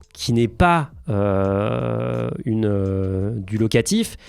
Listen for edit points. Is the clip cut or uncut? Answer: uncut